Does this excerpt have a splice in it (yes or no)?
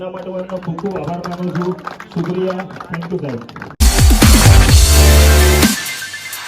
yes